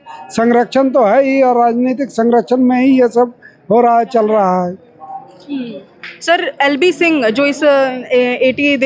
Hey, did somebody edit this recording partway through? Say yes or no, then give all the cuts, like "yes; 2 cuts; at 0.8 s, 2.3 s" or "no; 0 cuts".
no; 0 cuts